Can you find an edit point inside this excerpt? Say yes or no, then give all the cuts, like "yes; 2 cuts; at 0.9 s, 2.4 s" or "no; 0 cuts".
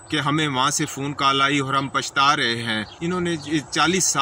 yes; 1 cut; at 2.9 s